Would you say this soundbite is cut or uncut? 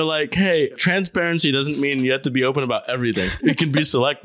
cut